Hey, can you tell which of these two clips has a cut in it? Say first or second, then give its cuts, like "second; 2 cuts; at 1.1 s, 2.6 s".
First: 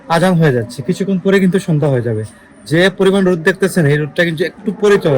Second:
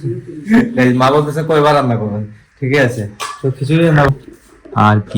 second; 1 cut; at 4.1 s